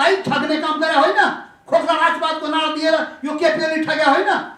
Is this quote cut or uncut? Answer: uncut